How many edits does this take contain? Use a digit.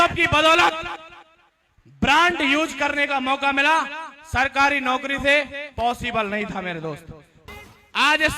1